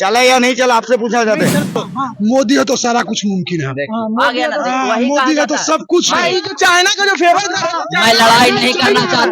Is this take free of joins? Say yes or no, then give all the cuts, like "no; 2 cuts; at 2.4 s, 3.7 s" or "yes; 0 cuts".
no; 1 cut; at 1.8 s